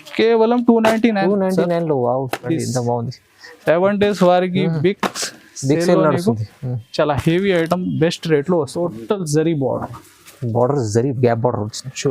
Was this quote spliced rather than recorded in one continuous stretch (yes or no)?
yes